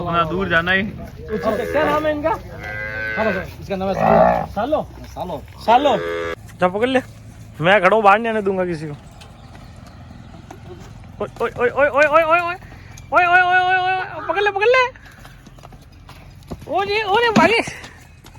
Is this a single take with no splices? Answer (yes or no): no